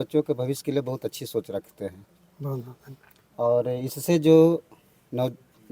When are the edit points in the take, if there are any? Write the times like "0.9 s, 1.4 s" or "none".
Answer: none